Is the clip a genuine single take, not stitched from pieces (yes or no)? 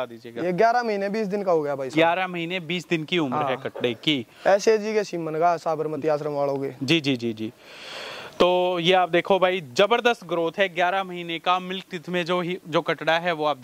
yes